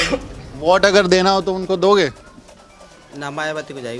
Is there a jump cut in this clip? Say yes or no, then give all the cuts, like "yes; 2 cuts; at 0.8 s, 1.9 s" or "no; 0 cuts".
no; 0 cuts